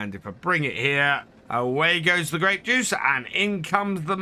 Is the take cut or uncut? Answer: cut